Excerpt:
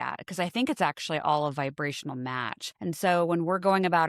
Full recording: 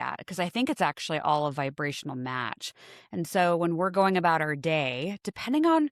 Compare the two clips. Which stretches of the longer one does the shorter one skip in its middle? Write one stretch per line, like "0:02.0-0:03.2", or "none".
0:02.6-0:02.9

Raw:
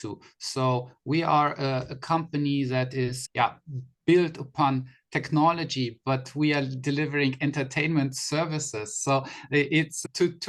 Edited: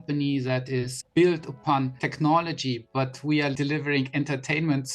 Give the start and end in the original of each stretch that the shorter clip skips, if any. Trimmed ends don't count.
0:03.2-0:03.9
0:04.9-0:05.1
0:06.7-0:06.8

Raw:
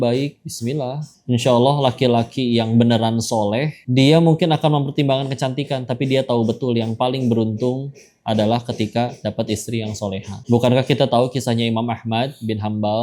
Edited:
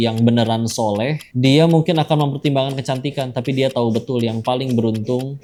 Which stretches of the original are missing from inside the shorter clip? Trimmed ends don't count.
none

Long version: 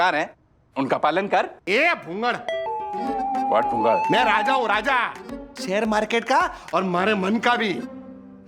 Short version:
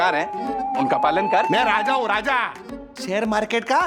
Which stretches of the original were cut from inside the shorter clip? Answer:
0:01.4-0:04.0

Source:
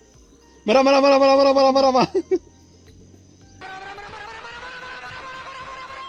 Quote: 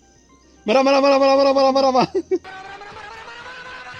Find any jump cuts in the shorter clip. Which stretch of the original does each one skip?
0:02.4-0:03.6

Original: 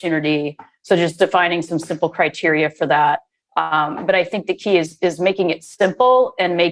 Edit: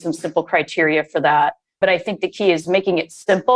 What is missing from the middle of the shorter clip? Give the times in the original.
0:03.3-0:03.9
0:04.9-0:05.2

